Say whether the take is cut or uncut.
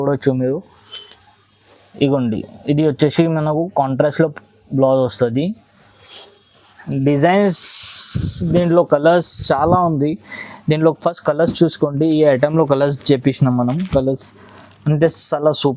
uncut